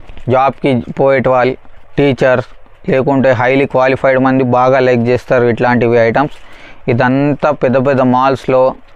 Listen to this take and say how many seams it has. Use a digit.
0